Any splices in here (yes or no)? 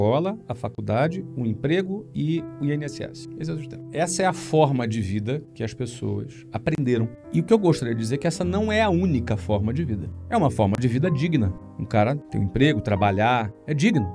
no